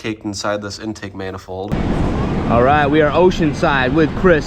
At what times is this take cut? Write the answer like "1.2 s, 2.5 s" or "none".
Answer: 1.7 s